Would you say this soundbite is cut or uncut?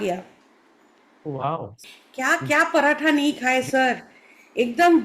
cut